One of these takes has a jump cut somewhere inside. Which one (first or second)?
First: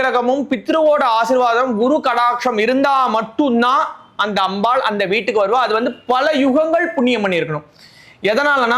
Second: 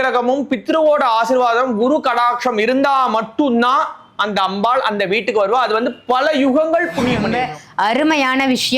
second